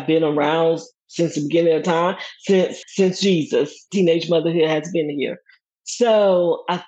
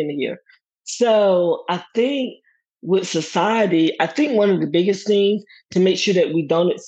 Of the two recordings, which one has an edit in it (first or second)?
first